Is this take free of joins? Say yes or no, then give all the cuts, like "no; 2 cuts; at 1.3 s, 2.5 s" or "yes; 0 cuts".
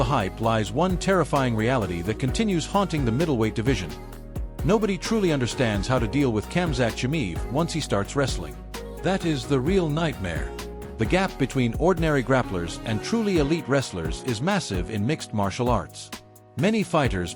yes; 0 cuts